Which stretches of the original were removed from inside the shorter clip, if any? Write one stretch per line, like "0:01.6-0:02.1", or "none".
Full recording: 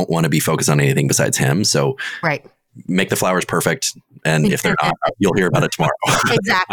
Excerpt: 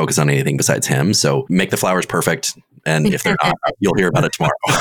0:02.0-0:02.8